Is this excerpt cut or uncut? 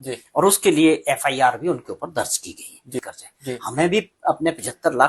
cut